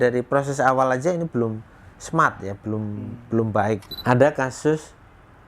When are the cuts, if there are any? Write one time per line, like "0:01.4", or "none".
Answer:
0:03.9